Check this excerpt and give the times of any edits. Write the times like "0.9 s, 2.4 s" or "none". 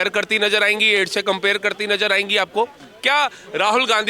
2.9 s